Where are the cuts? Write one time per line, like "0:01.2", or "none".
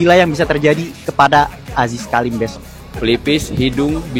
0:02.8

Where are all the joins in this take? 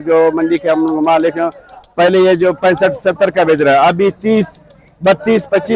none

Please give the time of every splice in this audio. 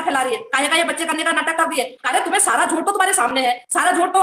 0:02.0

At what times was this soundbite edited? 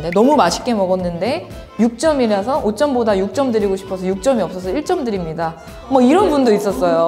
none

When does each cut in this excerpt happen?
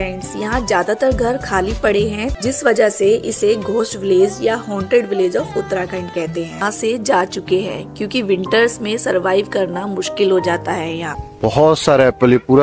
0:02.3
0:06.6
0:11.2

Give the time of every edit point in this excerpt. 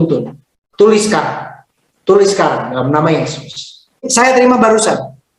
0:04.1

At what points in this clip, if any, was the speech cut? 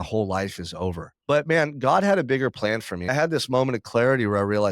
0:01.1
0:03.1

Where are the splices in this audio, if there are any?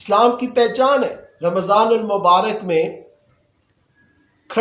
0:01.2

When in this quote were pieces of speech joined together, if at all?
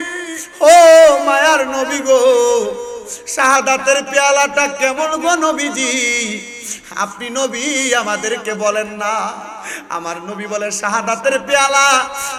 none

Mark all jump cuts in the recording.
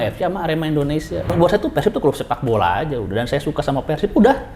0:01.3

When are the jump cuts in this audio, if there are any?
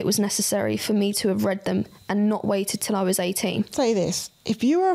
0:03.7

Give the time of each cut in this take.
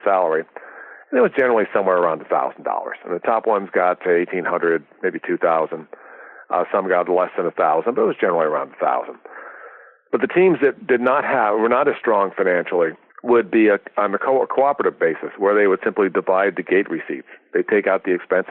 0:13.1

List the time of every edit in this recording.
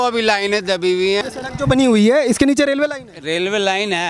0:01.2

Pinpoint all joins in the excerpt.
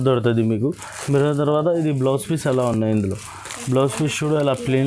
none

